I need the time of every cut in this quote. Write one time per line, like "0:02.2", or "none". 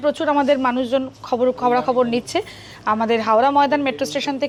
none